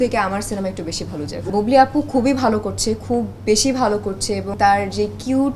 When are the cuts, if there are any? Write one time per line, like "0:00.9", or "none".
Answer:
0:01.5
0:04.6